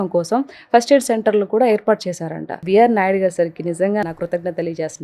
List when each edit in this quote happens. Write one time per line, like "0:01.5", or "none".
0:02.5
0:04.0